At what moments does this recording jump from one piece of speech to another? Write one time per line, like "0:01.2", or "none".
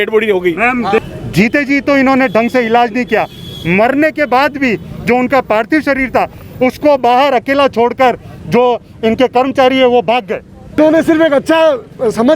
0:01.0
0:10.8

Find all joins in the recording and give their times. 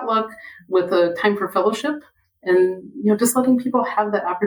none

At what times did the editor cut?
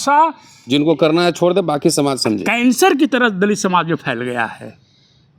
none

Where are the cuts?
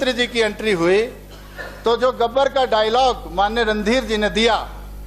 none

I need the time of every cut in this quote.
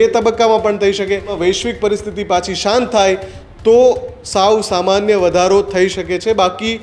0:01.3

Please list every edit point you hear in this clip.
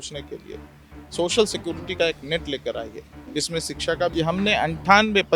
0:04.1

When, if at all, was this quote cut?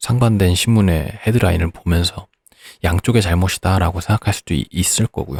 none

